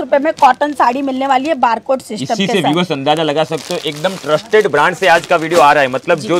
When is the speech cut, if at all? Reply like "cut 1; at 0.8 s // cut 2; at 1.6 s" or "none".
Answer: none